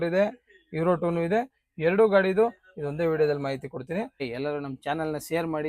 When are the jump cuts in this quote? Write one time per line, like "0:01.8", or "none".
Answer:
0:04.2